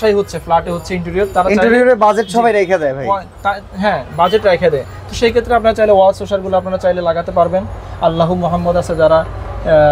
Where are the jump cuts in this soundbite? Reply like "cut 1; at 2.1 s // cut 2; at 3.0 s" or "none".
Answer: none